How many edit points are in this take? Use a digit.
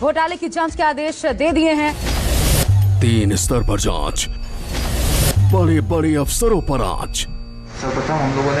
1